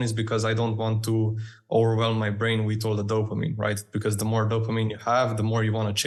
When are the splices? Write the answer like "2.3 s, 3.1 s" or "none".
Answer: none

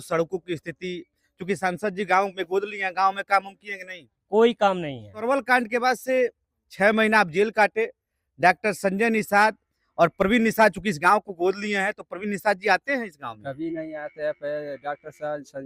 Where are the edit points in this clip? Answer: 5.2 s

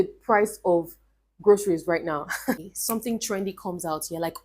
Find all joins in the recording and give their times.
2.6 s

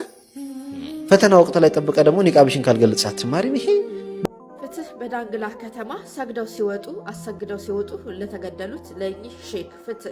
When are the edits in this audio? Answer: 4.2 s

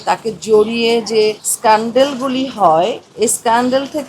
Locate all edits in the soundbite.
1.5 s, 3.0 s

